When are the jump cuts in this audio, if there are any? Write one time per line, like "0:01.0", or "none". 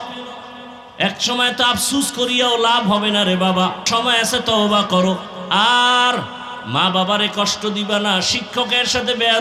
none